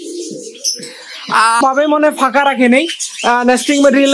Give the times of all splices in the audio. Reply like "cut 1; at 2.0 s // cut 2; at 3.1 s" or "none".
cut 1; at 1.6 s